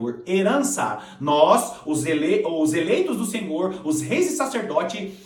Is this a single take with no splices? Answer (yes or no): yes